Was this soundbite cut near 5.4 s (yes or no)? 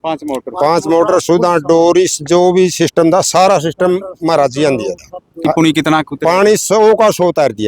yes